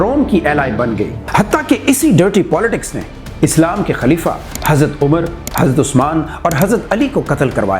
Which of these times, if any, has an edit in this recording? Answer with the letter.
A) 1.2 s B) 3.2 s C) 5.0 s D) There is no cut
A